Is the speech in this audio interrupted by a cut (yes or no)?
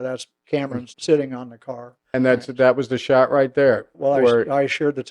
yes